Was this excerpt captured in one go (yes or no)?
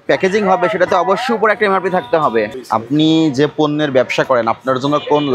no